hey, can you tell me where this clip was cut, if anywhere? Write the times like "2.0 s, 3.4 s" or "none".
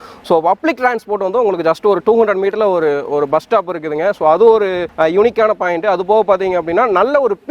none